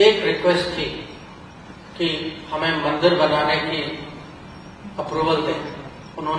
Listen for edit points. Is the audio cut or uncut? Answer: uncut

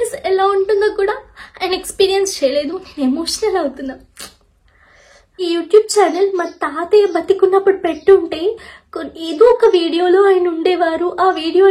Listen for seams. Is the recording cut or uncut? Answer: cut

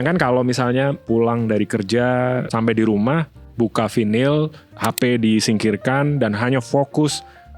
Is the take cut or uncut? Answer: cut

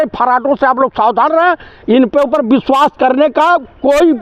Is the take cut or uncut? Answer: uncut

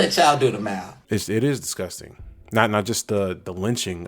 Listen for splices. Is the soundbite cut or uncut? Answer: cut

